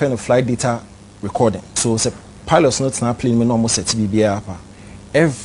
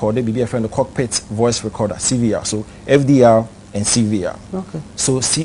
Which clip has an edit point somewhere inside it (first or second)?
first